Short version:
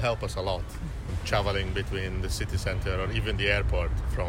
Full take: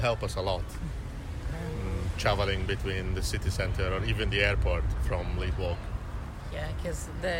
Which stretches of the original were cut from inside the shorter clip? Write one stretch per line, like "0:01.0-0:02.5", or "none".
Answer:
0:01.1-0:02.1